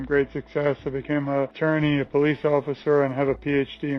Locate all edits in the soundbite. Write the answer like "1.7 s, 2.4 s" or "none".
1.5 s